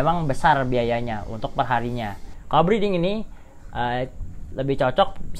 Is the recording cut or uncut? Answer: cut